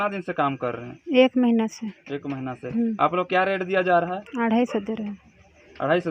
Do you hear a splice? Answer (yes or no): no